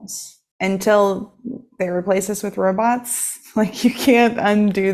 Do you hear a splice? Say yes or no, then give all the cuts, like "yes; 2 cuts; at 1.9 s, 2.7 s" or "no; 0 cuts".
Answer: no; 0 cuts